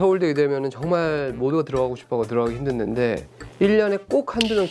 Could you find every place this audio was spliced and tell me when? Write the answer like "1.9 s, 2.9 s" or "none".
none

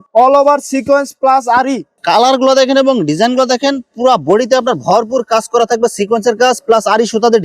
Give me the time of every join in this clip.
1.9 s

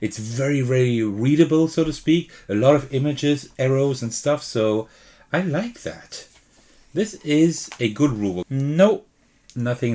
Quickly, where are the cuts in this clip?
8.4 s

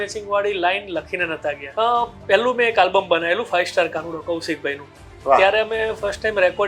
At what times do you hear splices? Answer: 1.6 s

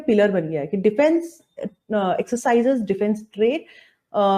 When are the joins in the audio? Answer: none

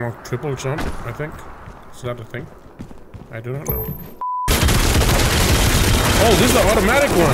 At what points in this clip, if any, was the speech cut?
4.5 s

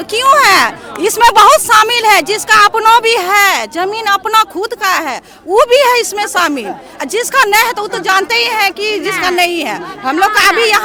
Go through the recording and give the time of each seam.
none

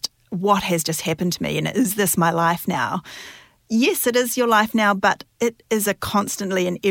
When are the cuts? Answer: none

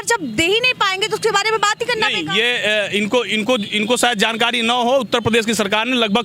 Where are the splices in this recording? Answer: none

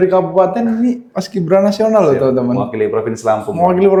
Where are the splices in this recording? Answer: none

